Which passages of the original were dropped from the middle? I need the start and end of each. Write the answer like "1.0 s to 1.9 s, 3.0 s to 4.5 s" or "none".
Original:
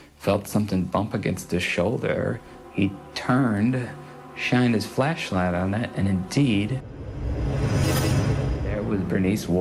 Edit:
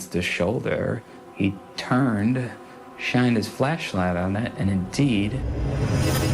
6.8 s to 7.3 s

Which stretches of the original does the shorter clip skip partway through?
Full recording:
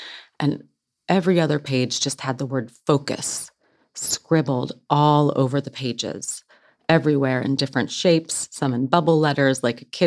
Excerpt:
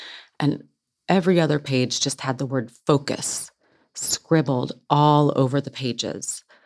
none

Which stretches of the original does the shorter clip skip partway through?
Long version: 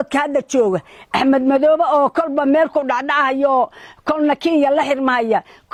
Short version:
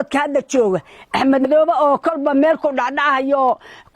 1.5 s to 1.6 s

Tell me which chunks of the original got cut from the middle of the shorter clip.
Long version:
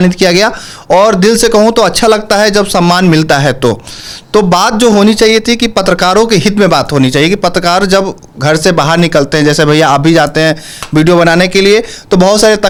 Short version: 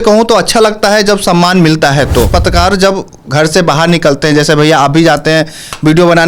3.8 s to 7.4 s

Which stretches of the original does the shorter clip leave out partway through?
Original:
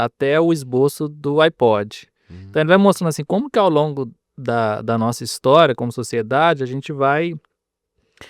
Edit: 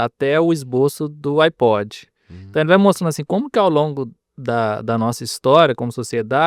none

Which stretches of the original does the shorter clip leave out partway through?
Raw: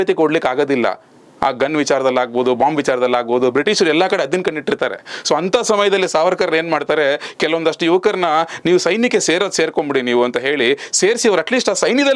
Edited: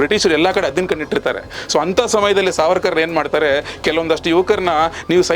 none

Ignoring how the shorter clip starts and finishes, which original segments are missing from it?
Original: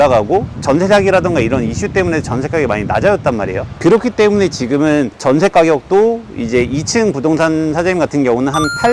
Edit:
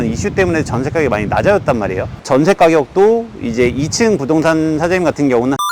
3.7 s to 5.1 s

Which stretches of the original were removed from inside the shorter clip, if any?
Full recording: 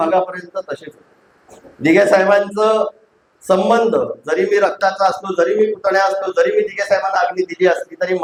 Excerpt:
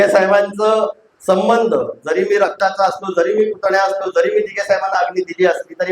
3.0 s to 3.3 s

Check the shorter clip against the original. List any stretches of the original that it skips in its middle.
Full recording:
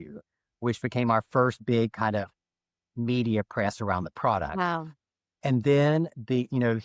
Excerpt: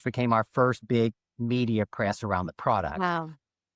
1.9 s to 2.7 s

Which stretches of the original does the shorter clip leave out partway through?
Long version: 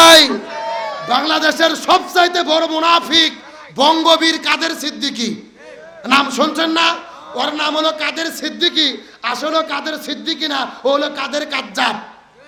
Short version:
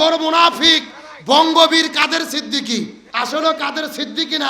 5.5 s to 9.1 s

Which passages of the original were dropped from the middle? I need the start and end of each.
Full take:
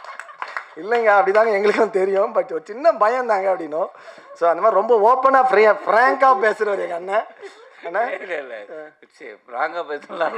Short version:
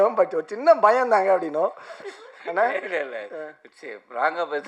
4.2 s to 7.4 s

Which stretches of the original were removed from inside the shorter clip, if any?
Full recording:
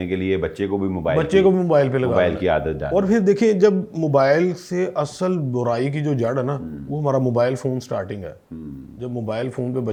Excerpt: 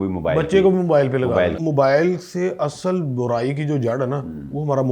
2.4 s to 3.9 s

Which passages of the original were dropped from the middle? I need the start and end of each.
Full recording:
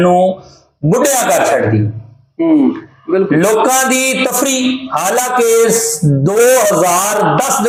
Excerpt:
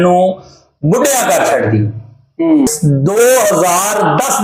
2.7 s to 5.9 s

